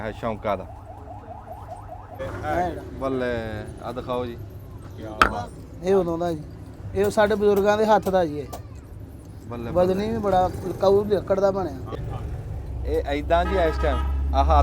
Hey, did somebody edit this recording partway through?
yes; 2 cuts; at 2.2 s, 11.9 s

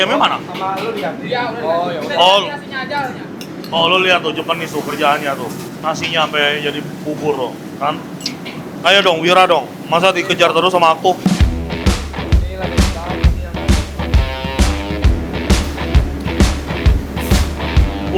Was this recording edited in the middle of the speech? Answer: no; 0 cuts

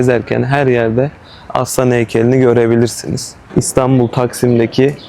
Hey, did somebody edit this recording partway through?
yes; 1 cut; at 3.5 s

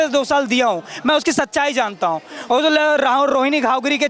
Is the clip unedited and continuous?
yes; 0 cuts

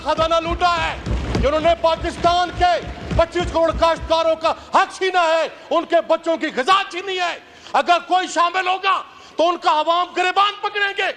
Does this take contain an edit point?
no; 0 cuts

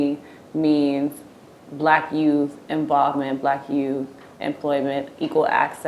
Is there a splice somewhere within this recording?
no; 0 cuts

